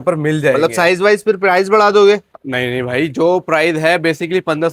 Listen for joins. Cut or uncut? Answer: uncut